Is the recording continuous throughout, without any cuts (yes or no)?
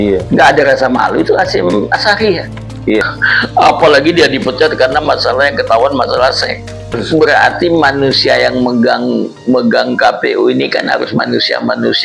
no